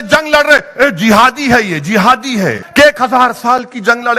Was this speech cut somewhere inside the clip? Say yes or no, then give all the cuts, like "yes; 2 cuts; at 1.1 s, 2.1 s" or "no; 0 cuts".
yes; 1 cut; at 2.6 s